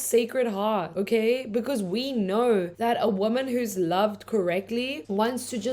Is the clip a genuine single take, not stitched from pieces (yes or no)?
yes